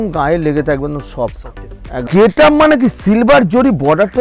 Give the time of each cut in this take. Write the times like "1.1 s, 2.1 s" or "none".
2.1 s